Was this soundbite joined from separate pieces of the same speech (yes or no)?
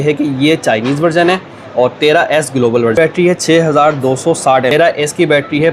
yes